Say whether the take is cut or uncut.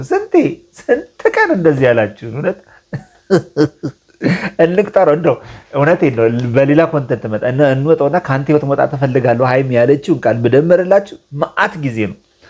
uncut